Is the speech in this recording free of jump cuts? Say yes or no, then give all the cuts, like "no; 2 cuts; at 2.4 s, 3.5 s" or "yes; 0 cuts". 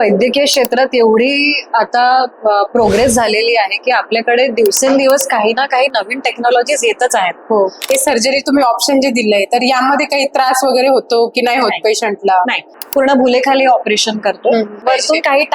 no; 3 cuts; at 7.8 s, 12.7 s, 14.8 s